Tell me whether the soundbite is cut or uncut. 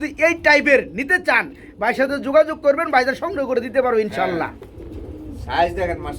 uncut